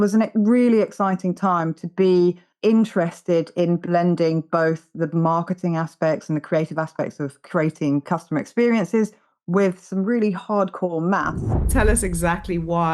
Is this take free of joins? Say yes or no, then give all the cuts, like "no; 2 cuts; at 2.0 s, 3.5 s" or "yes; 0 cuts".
no; 4 cuts; at 2.5 s, 7.4 s, 8.0 s, 11.7 s